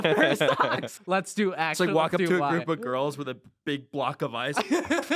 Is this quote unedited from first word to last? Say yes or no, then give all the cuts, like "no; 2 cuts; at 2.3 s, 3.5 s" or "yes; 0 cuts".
no; 1 cut; at 0.9 s